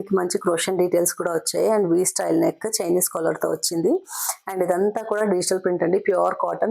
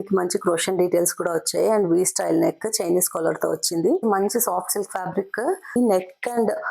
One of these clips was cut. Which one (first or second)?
second